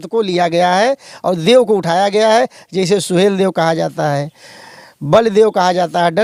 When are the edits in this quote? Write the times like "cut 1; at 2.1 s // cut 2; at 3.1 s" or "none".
none